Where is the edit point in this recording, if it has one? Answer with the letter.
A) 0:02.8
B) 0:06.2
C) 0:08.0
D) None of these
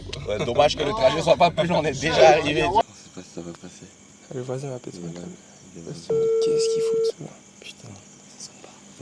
A